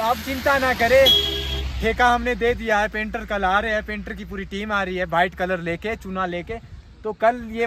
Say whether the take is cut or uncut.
uncut